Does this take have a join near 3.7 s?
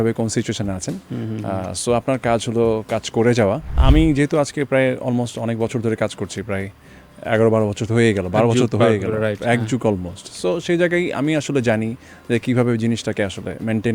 yes; 1 cut; at 3.7 s

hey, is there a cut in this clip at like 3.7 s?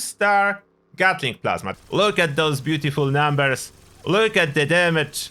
no; 1 cut; at 1.7 s

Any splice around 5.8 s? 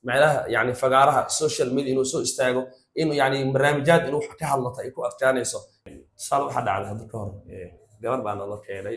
yes; 1 cut; at 5.8 s

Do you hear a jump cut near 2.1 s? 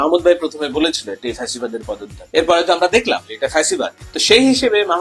yes; 2 cuts; at 2.1 s, 4.1 s

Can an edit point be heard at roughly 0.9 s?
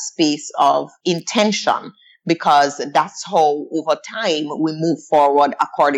yes; 1 cut; at 0.9 s

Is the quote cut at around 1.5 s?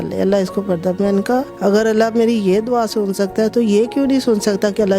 yes; 1 cut; at 1.5 s

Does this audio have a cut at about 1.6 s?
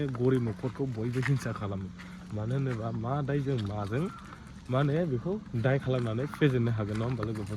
no; 0 cuts

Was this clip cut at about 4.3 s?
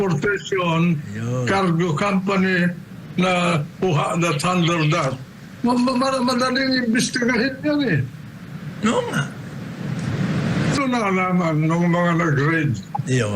no; 1 cut; at 10.8 s

